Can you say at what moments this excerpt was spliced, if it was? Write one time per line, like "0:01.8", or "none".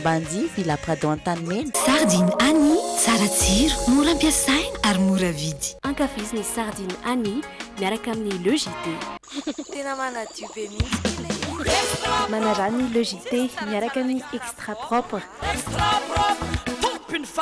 0:01.8